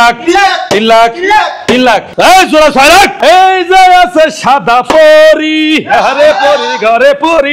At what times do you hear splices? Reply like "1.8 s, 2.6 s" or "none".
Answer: 2.1 s, 3.2 s